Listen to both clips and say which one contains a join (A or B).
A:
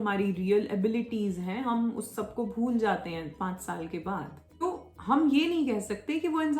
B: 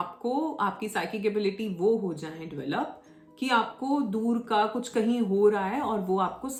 A